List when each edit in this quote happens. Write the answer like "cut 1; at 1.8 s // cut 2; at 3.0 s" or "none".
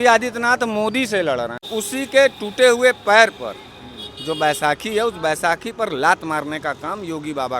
cut 1; at 1.7 s